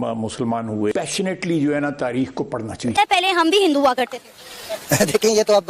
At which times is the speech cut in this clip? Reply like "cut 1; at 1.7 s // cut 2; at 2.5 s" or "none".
cut 1; at 2.9 s

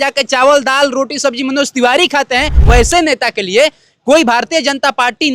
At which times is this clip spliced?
cut 1; at 2.6 s

